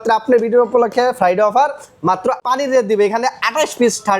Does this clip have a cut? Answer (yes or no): yes